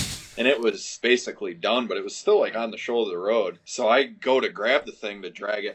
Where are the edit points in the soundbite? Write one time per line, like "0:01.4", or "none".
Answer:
0:01.0
0:03.6